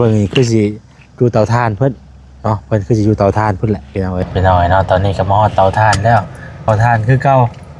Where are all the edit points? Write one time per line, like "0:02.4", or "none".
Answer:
0:04.3
0:06.7

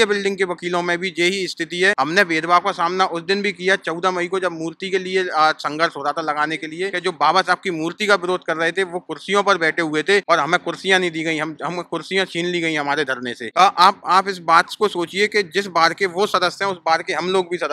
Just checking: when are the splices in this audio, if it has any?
0:02.0
0:07.0
0:10.2
0:13.4

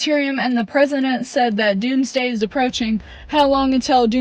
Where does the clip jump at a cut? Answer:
none

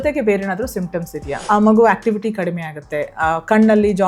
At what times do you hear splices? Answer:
0:01.3

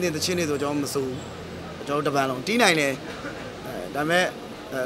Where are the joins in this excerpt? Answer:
none

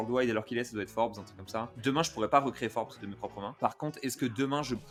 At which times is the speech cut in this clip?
none

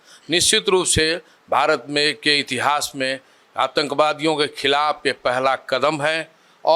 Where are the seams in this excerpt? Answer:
none

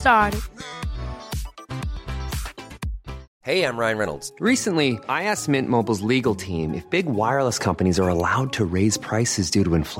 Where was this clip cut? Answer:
0:03.3

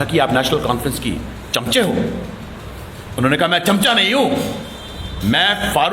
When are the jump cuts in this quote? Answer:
none

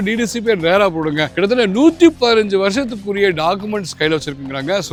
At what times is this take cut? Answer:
none

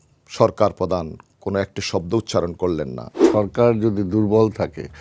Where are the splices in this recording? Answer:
0:03.3

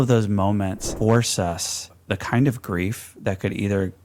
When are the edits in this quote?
0:00.8
0:02.0

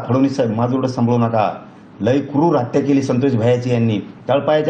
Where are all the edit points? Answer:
none

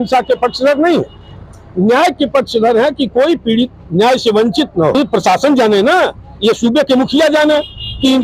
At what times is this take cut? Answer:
0:04.9

